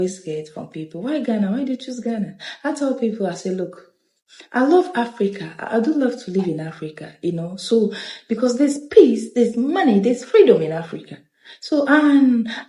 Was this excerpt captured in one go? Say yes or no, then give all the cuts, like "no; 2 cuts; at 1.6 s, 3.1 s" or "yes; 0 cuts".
yes; 0 cuts